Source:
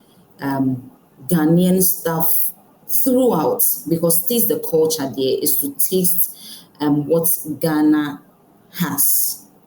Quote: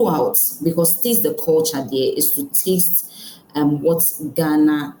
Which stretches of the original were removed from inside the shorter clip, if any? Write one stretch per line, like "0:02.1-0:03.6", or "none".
none